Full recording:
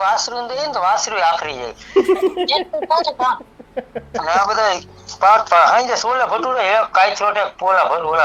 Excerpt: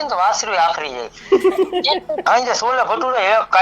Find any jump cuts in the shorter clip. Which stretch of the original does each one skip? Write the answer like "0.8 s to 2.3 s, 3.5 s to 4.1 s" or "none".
2.9 s to 5.7 s